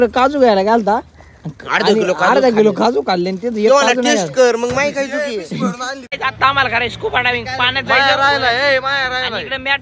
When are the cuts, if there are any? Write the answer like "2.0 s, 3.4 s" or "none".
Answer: 6.0 s